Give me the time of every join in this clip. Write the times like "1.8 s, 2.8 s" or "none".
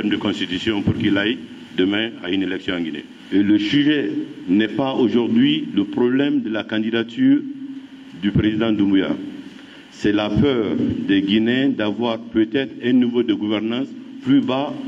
3.1 s